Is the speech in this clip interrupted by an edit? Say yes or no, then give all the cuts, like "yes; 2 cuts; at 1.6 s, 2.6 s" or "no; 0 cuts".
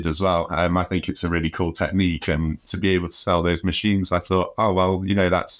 no; 0 cuts